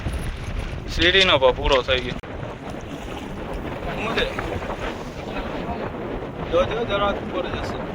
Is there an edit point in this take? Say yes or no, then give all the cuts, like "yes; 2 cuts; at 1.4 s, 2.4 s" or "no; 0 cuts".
yes; 1 cut; at 2.2 s